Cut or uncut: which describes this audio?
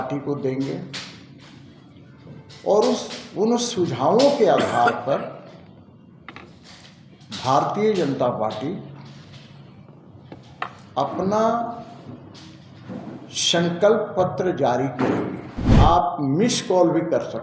cut